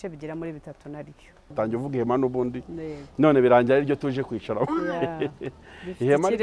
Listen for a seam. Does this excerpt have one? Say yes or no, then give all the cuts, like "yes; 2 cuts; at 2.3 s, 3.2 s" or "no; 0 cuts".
yes; 1 cut; at 1.5 s